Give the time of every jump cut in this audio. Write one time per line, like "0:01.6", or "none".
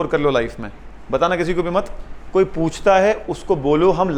none